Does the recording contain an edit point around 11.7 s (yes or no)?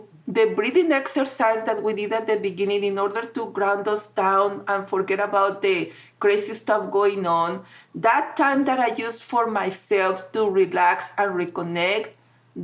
no